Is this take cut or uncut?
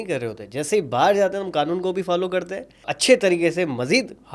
cut